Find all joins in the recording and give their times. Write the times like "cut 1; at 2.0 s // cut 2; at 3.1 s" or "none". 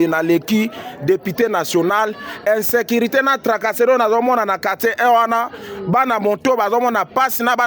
none